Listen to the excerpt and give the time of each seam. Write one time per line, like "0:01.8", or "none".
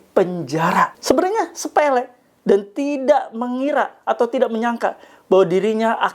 0:01.0